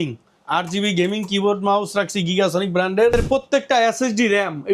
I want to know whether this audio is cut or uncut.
cut